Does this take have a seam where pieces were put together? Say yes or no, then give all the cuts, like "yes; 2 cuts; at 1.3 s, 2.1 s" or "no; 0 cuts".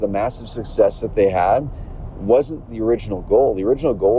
yes; 1 cut; at 2.7 s